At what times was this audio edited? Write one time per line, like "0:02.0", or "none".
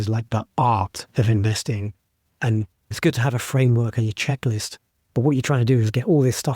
0:02.9